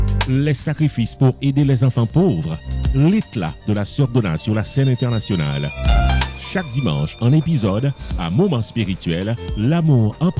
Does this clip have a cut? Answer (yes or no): no